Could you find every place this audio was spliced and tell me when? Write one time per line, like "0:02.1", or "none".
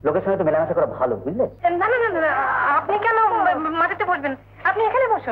0:01.5